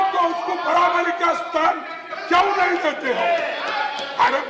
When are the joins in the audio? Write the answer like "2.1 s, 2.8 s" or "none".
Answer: none